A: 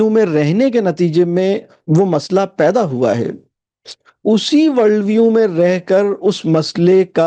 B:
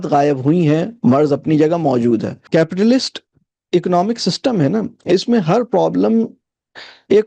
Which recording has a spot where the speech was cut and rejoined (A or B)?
B